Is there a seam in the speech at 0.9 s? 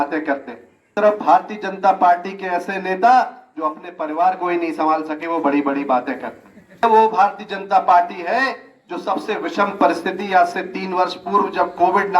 yes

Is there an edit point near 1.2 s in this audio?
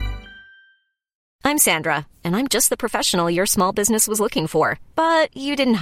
yes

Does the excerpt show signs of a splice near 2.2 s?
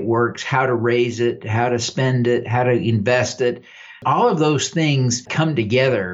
no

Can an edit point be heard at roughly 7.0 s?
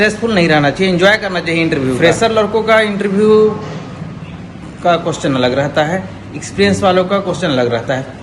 no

